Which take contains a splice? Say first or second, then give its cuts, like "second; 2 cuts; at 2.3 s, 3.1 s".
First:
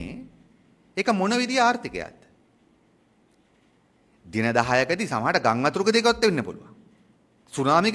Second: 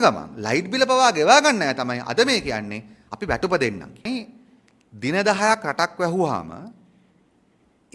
second; 1 cut; at 4.0 s